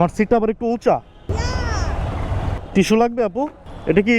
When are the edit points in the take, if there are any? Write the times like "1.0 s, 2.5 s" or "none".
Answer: 1.3 s, 2.6 s